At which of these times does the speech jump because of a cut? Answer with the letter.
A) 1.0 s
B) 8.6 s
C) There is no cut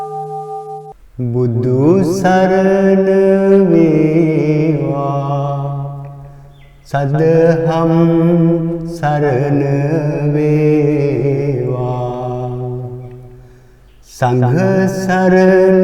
A